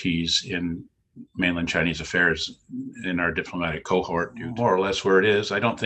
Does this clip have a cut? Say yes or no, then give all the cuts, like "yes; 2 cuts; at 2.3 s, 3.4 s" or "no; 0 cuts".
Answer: yes; 1 cut; at 4.4 s